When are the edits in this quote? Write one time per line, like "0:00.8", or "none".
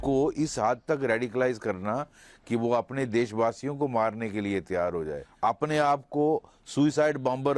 0:05.2